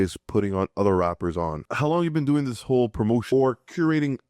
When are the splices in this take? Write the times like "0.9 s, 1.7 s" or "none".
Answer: 1.6 s, 3.2 s